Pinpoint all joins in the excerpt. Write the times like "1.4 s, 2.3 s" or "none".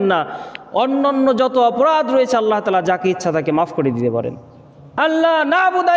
4.9 s